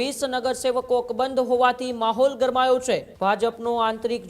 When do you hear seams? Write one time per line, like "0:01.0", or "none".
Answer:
0:03.1